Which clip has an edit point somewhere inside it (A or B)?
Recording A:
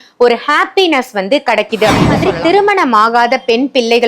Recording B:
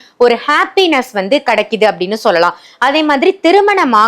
A